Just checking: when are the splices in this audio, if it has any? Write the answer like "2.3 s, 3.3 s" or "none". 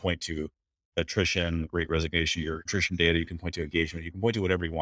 2.7 s